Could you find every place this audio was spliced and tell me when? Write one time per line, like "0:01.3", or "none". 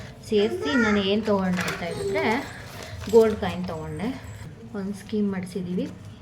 0:04.3